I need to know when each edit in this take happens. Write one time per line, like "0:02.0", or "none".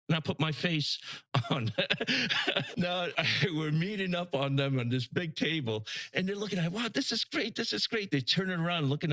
0:02.7